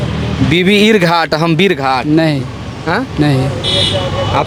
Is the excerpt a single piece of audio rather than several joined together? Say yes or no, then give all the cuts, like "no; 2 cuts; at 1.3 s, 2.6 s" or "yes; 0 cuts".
yes; 0 cuts